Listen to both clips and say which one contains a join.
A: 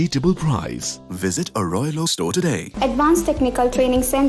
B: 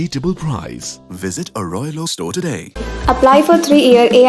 A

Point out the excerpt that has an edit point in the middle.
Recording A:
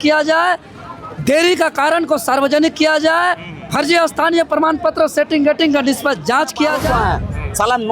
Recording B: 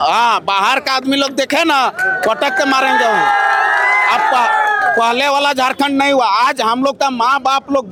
A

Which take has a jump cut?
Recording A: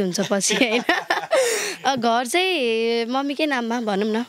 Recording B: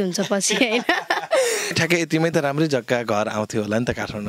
B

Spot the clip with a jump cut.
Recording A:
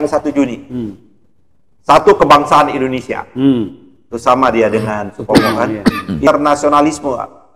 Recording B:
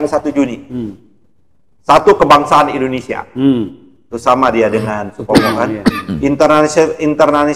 A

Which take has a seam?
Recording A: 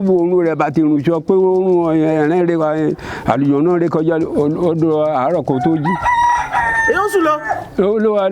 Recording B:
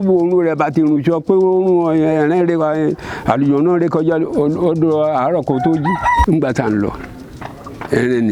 B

